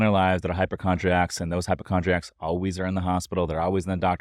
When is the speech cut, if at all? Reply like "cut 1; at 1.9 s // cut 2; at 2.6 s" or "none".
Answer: none